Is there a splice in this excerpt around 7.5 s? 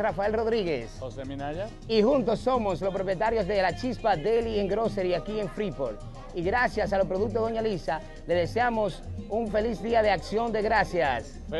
yes; 1 cut; at 7.5 s

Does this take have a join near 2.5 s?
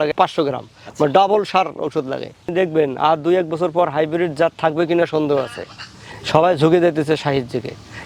yes; 1 cut; at 2.5 s

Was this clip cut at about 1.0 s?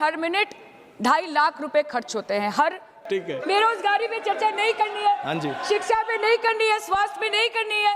no; 1 cut; at 3.0 s

